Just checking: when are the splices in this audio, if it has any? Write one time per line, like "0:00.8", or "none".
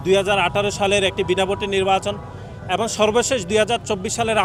none